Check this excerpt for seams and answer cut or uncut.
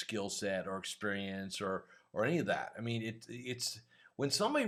uncut